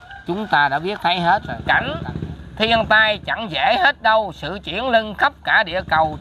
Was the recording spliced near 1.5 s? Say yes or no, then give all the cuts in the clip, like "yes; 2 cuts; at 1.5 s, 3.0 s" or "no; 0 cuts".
yes; 1 cut; at 1.5 s